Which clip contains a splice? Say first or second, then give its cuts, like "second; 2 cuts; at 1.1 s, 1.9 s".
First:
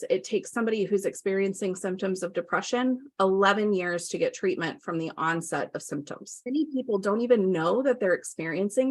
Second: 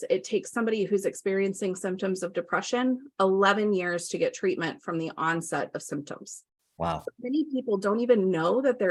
first; 1 cut; at 6.4 s